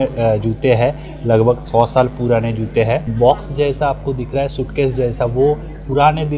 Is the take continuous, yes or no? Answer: no